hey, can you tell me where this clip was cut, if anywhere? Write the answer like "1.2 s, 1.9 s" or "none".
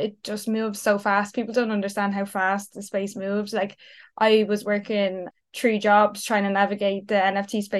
5.3 s